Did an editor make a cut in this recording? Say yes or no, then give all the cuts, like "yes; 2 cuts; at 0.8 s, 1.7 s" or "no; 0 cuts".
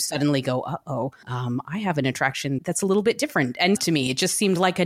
yes; 3 cuts; at 1.3 s, 2.6 s, 3.8 s